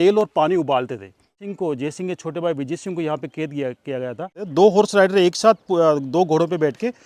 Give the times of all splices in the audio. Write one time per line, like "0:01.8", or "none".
0:01.4
0:04.5